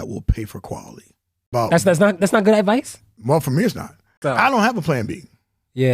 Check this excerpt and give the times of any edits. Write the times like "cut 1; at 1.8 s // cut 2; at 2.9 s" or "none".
cut 1; at 1.4 s // cut 2; at 4.1 s